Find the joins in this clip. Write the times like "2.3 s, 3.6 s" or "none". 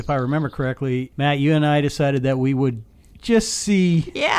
1.1 s

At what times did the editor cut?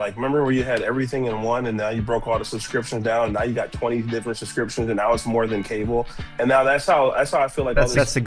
none

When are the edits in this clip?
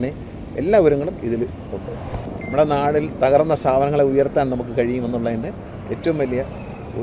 2.3 s

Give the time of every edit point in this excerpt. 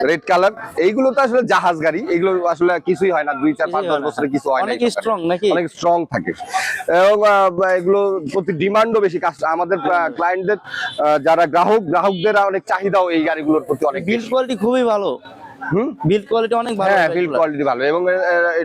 none

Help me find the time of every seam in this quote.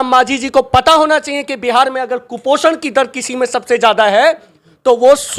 none

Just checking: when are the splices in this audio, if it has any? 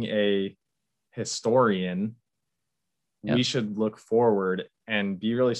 none

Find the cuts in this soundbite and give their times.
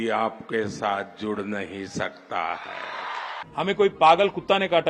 3.3 s

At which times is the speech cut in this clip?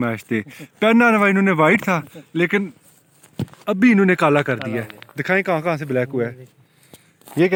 none

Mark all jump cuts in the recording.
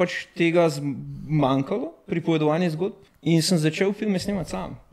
3.1 s

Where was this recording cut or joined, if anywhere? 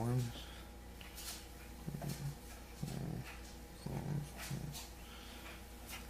1.3 s

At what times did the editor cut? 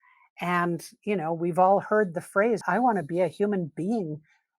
2.6 s

